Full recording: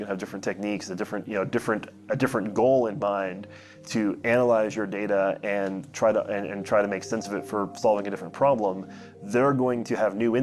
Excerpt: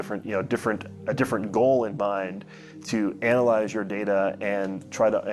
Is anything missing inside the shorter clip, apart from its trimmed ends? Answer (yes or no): no